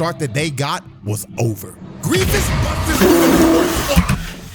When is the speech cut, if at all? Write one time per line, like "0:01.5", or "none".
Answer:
none